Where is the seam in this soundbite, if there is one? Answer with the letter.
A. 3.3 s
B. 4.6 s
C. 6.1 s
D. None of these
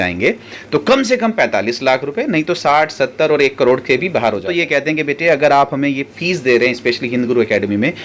B